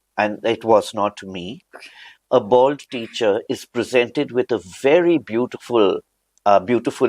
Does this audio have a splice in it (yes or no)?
no